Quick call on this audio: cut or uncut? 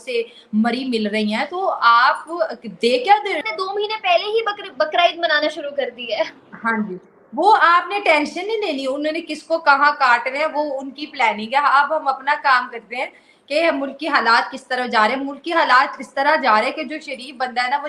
cut